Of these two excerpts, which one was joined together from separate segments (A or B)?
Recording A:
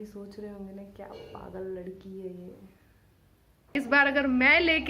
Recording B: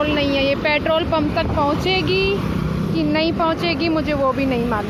A